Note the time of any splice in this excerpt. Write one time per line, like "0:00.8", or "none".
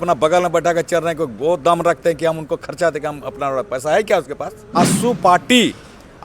0:04.7